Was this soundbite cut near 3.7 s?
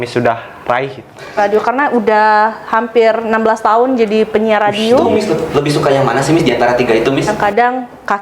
no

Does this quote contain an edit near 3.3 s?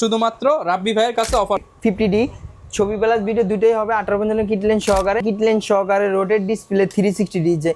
no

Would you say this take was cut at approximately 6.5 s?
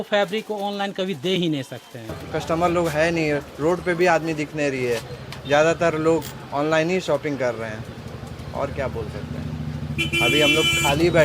no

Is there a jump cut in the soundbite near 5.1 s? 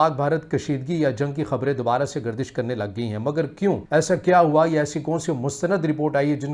no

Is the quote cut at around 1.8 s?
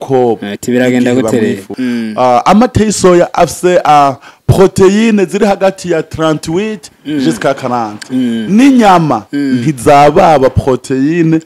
yes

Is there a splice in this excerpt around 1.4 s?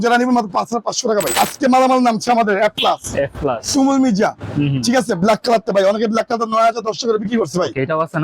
yes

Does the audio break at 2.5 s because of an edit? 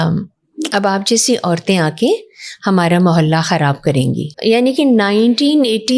no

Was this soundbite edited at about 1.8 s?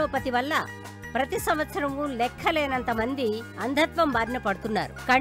no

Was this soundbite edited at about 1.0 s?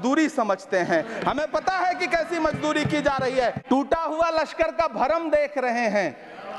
no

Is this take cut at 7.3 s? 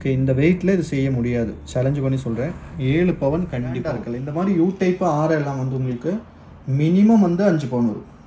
no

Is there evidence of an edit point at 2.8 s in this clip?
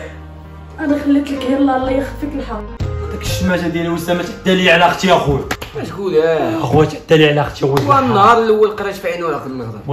yes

